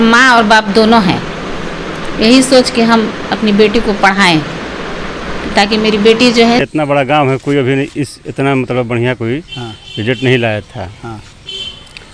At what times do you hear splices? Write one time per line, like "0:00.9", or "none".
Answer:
0:06.6